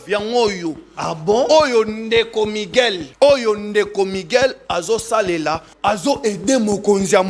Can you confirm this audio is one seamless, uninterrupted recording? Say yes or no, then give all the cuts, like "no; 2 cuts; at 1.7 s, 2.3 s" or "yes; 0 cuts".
no; 2 cuts; at 3.0 s, 5.7 s